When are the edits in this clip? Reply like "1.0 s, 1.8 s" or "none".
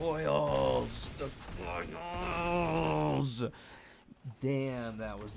none